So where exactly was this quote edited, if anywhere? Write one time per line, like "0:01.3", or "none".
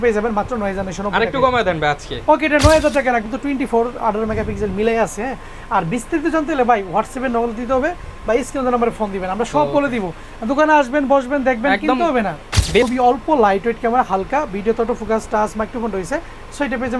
0:03.3
0:12.8